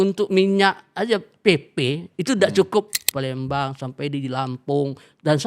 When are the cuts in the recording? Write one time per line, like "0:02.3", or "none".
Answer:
0:03.0